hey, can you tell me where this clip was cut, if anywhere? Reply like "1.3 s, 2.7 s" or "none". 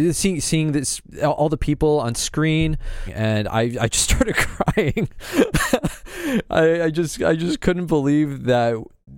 3.1 s